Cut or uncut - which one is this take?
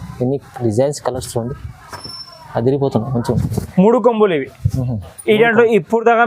cut